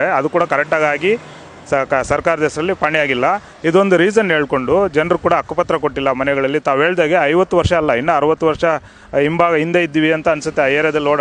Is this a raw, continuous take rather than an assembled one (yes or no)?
yes